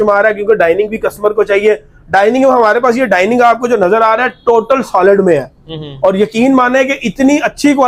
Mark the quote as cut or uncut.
uncut